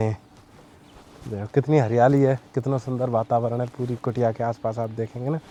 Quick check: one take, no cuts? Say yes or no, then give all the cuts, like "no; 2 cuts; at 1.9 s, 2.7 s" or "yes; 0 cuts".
yes; 0 cuts